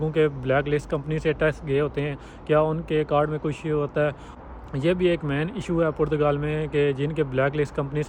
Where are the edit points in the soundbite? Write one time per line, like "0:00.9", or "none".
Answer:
none